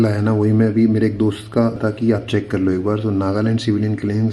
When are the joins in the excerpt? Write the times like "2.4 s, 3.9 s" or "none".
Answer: 1.8 s